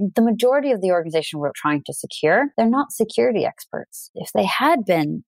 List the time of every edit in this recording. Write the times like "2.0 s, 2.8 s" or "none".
2.5 s, 4.0 s